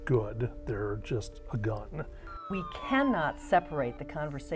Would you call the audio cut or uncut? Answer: cut